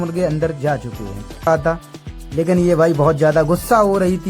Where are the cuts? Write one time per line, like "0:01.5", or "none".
0:01.5